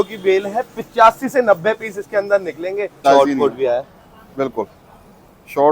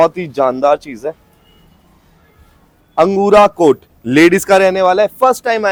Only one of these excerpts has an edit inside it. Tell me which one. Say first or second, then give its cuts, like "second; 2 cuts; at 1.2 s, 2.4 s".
first; 1 cut; at 3.0 s